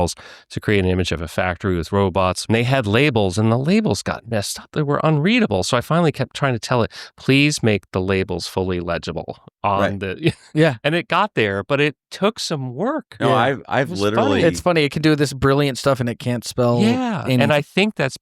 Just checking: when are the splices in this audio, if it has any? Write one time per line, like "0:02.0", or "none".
0:02.4
0:04.6